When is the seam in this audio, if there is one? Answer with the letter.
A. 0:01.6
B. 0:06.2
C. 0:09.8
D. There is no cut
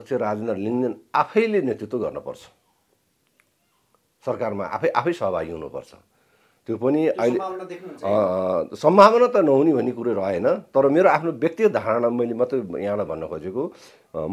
D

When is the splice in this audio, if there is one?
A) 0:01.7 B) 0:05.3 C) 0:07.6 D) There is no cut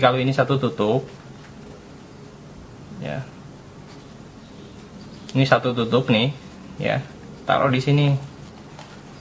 D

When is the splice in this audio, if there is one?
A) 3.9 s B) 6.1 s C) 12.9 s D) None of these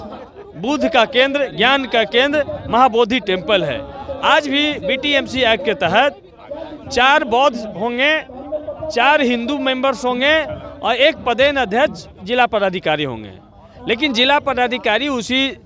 D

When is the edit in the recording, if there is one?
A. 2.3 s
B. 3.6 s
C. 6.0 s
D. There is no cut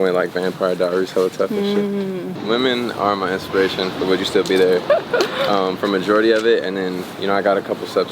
A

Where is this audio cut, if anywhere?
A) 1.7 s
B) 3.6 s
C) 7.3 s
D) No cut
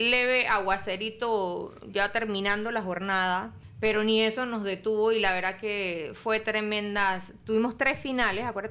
B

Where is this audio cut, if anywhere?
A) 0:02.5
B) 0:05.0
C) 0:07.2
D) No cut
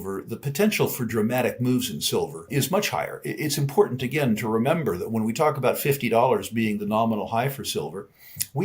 A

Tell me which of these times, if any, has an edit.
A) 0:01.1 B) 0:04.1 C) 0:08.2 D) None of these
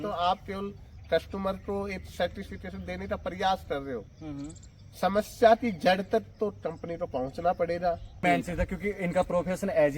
C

